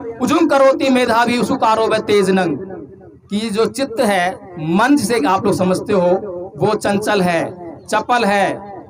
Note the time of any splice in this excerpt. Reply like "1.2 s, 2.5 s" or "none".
none